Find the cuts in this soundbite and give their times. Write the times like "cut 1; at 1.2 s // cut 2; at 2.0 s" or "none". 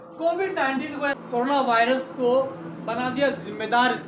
cut 1; at 1.2 s